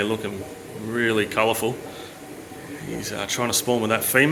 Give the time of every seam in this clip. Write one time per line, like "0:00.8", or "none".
none